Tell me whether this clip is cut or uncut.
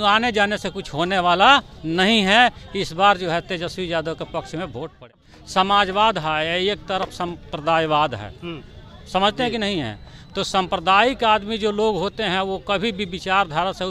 cut